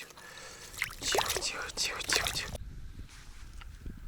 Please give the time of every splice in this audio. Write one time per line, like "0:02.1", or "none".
0:02.6